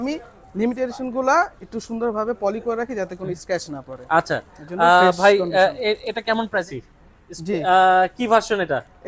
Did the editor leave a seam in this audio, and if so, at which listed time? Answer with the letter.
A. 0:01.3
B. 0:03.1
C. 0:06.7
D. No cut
C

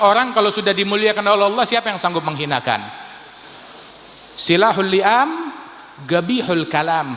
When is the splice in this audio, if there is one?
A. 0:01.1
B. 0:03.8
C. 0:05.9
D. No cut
B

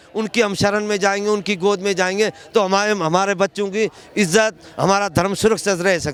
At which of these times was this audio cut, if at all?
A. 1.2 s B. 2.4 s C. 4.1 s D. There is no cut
D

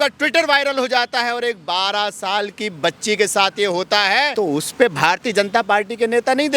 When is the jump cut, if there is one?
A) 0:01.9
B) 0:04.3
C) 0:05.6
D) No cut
B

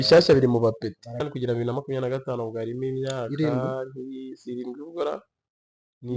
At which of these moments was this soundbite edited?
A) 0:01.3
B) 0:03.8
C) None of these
A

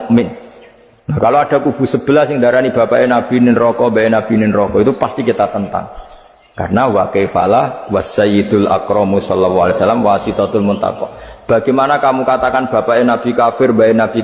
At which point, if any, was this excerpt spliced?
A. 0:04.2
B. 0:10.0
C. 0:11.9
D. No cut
D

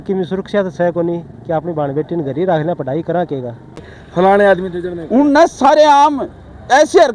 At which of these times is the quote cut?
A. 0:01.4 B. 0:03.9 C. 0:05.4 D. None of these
B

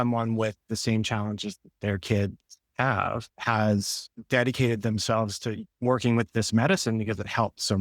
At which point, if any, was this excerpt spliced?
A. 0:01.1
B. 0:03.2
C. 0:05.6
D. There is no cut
C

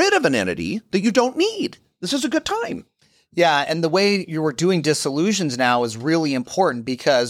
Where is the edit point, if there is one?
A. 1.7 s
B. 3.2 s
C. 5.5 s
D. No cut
D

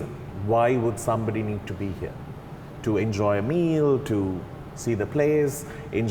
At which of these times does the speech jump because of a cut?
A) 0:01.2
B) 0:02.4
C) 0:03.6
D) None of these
D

